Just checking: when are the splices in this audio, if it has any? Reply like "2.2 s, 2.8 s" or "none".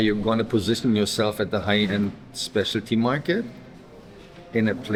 none